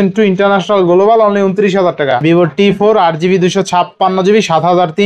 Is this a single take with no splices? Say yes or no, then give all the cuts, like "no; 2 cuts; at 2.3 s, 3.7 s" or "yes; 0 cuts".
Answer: no; 1 cut; at 2.2 s